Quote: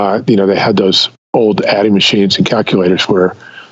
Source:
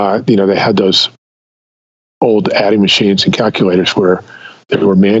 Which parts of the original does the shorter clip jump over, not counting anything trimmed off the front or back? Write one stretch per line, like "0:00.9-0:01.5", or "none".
0:01.1-0:02.0

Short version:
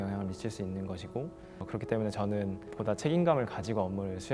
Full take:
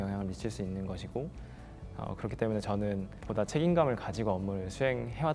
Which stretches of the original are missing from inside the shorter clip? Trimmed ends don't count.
0:01.6-0:02.1

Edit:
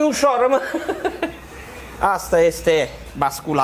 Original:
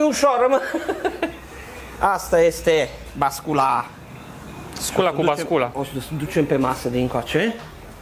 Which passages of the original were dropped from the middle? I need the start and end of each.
none

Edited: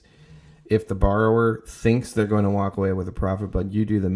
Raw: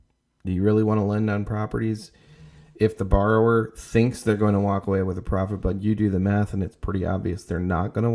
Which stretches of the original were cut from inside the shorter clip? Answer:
none

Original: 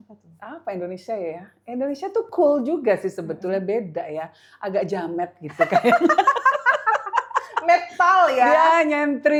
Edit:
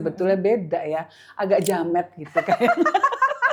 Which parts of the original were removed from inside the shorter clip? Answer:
none

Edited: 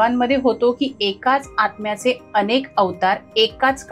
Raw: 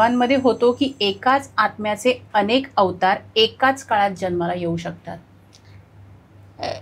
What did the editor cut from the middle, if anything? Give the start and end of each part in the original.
none

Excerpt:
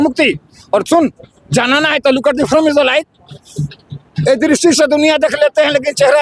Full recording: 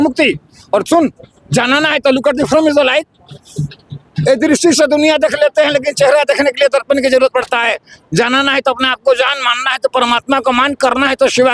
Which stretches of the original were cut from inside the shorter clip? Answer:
none

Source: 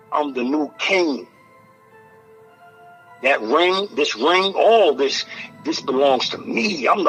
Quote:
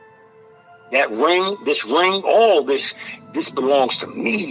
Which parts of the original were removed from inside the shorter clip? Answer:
0:02.8-0:03.2

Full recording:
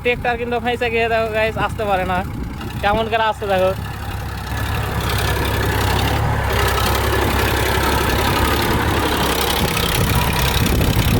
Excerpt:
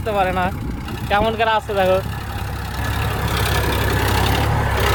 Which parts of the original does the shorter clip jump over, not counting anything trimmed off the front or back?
none

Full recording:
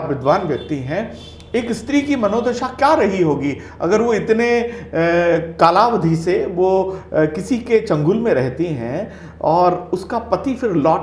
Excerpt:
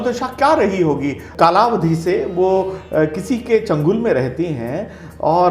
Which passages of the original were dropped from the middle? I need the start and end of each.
0:03.7-0:05.5

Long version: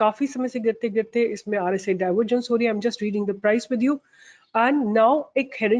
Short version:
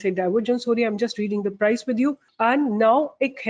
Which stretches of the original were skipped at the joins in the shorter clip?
0:04.1-0:04.4

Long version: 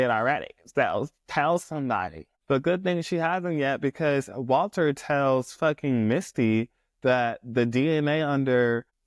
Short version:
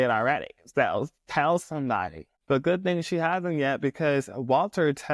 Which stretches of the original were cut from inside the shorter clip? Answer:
none

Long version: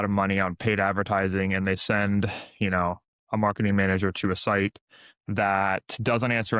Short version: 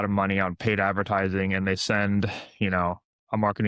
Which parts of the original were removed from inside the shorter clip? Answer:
none

